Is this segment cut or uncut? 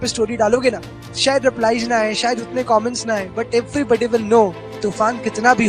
cut